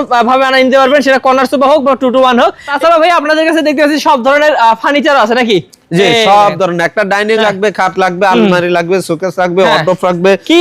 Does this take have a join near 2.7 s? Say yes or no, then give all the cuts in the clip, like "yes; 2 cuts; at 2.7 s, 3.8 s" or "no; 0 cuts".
yes; 1 cut; at 2.7 s